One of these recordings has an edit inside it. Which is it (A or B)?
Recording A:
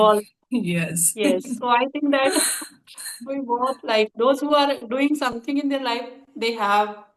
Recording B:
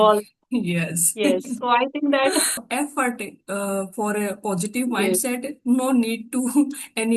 B